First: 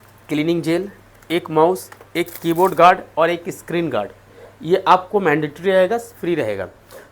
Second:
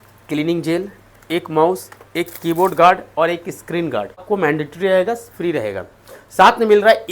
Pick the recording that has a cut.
second; 1 cut; at 4.2 s

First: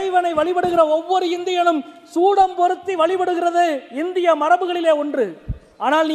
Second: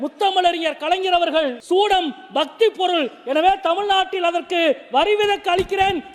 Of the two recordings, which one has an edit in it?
second; 1 cut; at 1.6 s

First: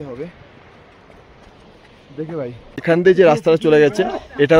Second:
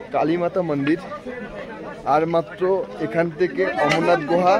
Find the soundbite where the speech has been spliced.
first; 1 cut; at 2.7 s

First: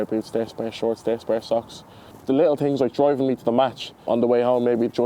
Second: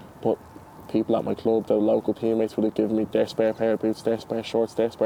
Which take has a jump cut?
first; 1 cut; at 4.0 s

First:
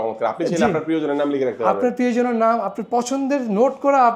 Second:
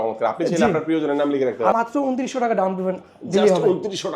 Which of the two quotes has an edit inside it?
second; 1 cut; at 1.7 s

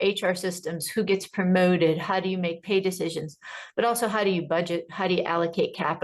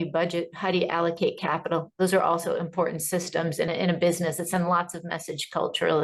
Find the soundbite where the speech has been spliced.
second; 1 cut; at 3.7 s

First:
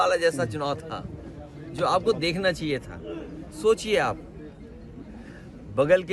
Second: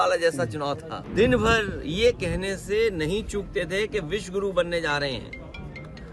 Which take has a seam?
second; 1 cut; at 0.9 s

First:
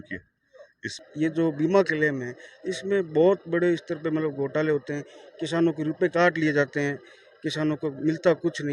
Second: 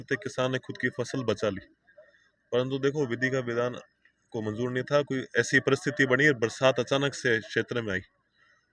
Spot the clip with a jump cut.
first; 1 cut; at 1.0 s

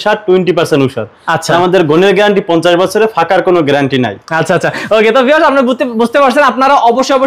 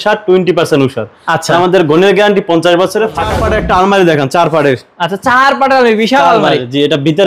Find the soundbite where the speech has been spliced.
second; 1 cut; at 3.4 s

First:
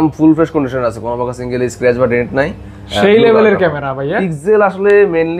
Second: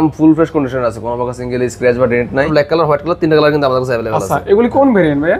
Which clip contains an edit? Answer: second; 1 cut; at 2.5 s

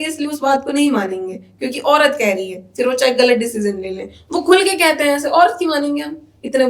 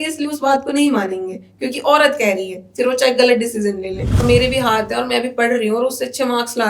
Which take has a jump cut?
second; 1 cut; at 4.2 s

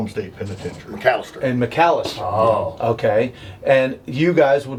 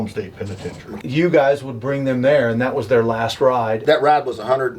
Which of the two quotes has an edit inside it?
second; 2 cuts; at 0.9 s, 3.8 s

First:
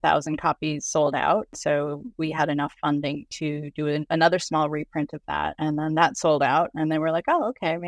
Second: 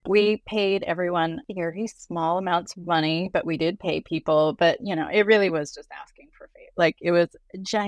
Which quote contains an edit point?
first; 3 cuts; at 1.6 s, 4.0 s, 5.5 s

